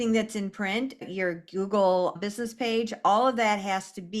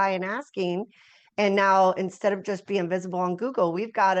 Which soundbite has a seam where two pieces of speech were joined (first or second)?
first